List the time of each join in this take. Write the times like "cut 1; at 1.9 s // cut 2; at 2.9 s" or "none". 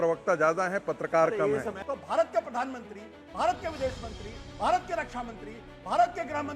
cut 1; at 1.8 s